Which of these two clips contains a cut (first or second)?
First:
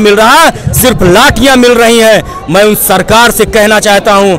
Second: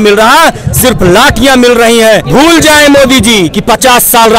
second